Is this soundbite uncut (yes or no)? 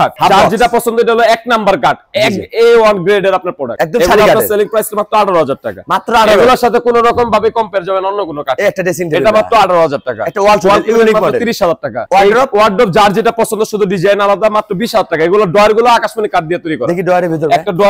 yes